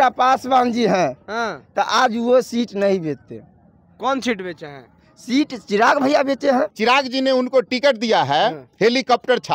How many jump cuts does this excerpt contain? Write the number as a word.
one